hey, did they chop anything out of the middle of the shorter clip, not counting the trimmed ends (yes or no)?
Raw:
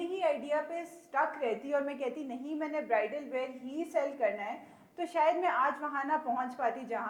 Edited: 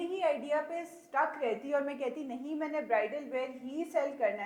no